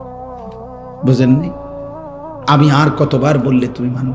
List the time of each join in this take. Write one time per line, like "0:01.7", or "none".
0:01.0